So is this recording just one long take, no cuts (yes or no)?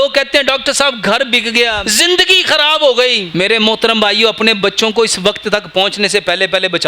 no